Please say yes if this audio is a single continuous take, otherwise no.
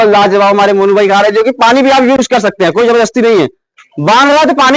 no